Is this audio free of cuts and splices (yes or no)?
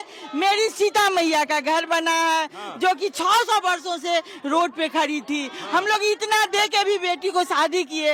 yes